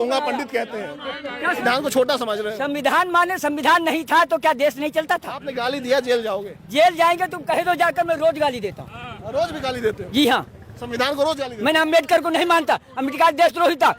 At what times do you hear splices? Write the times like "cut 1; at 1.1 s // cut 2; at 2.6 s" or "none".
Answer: cut 1; at 1.6 s